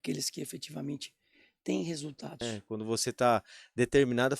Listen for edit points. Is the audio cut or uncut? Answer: cut